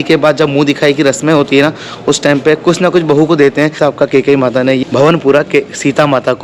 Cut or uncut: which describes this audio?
uncut